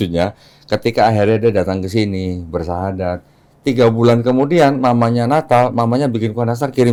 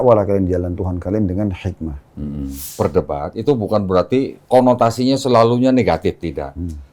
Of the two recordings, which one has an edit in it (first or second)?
second